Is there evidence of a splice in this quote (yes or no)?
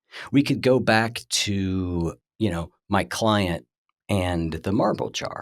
yes